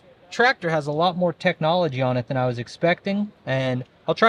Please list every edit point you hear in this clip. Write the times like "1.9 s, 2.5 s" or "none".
none